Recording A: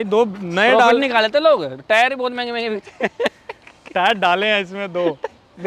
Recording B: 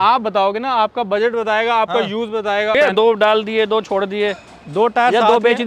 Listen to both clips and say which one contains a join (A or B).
B